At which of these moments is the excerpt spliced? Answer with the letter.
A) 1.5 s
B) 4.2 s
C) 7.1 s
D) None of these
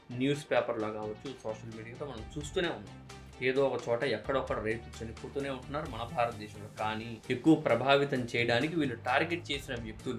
C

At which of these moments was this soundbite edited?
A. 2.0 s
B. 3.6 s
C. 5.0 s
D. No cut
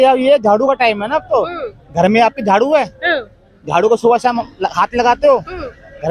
D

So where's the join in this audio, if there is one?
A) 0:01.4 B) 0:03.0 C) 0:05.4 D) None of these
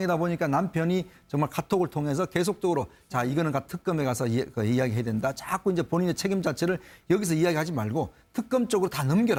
D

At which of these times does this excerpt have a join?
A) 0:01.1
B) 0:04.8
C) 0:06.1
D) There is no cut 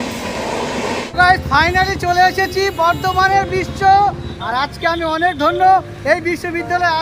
A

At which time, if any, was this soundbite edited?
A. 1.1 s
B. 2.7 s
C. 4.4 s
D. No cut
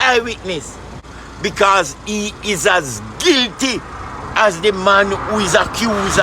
A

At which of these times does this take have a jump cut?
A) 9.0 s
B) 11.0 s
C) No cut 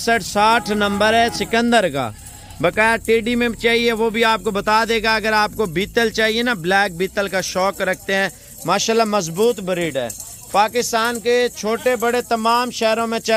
C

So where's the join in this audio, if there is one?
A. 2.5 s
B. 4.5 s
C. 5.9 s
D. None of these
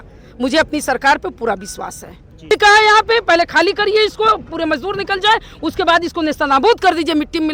A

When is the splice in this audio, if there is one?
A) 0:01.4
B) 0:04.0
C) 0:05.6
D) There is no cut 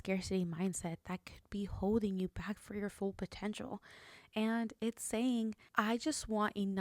C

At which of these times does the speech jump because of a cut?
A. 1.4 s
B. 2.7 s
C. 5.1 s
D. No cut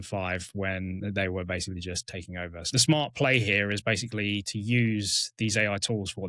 B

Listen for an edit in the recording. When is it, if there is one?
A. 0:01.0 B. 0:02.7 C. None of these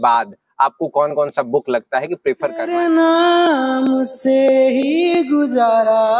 B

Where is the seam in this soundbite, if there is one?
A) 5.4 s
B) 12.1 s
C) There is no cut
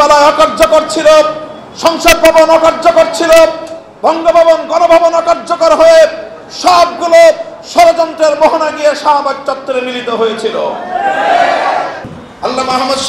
B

